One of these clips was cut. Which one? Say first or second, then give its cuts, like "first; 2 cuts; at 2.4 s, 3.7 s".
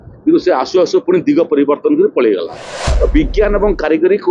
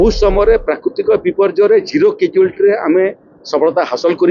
first; 1 cut; at 2.8 s